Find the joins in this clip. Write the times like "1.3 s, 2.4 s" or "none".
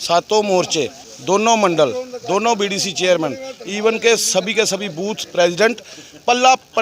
1.1 s